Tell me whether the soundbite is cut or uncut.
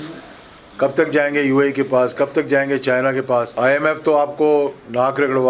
cut